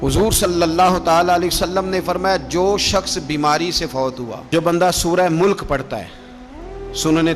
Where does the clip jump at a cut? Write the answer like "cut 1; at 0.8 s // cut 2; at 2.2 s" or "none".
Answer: cut 1; at 4.4 s